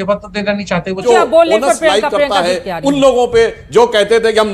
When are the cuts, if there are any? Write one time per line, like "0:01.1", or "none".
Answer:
0:01.0